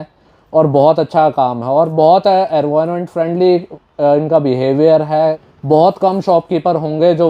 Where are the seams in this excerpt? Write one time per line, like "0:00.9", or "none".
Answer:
0:05.5